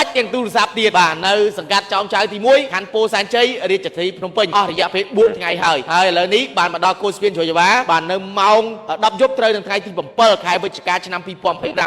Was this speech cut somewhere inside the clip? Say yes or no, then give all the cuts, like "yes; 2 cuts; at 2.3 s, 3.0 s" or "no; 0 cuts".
no; 0 cuts